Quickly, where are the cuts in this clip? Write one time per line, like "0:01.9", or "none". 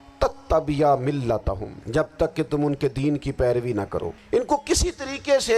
0:01.7
0:04.2